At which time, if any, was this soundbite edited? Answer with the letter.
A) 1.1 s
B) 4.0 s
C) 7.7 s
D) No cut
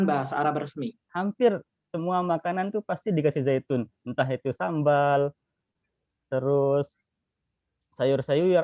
A